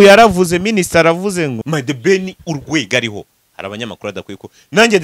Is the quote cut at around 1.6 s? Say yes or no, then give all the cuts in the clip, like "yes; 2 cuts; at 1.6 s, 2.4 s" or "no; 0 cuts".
yes; 1 cut; at 1.6 s